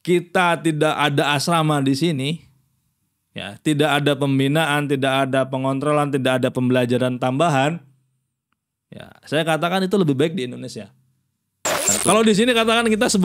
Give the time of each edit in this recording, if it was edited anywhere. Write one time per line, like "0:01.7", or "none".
0:11.9